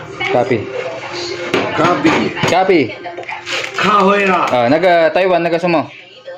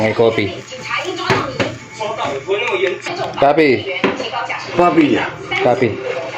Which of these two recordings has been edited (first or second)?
second